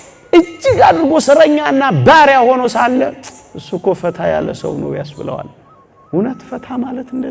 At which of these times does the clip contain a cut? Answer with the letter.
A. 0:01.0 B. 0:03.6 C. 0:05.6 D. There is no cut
D